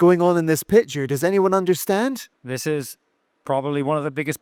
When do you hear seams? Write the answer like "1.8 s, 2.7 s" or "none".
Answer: none